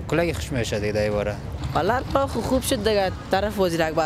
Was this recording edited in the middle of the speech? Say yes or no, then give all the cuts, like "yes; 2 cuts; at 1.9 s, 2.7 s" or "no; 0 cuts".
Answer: yes; 1 cut; at 1.5 s